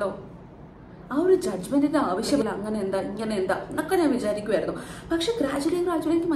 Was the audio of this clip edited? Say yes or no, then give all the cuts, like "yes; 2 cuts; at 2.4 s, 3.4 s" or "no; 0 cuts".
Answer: yes; 1 cut; at 2.4 s